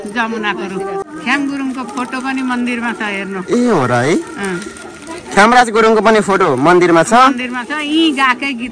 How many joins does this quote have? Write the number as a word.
one